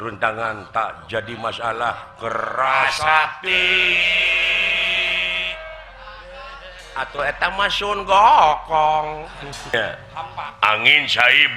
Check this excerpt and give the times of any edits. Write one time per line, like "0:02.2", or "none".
0:09.7